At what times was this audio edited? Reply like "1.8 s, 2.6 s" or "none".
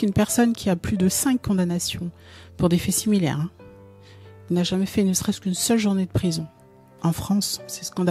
none